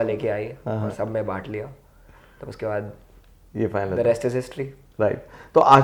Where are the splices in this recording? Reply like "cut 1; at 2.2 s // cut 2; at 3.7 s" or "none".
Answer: none